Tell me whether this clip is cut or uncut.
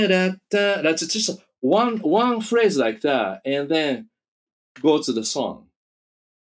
uncut